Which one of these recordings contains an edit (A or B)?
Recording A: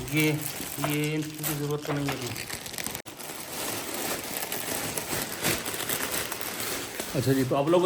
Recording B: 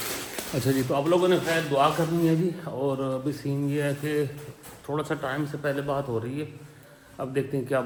A